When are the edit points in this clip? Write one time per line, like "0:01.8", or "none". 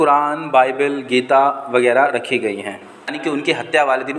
0:03.2